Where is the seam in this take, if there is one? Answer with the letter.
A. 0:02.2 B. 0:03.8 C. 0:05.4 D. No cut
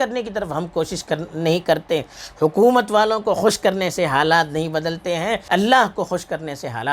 C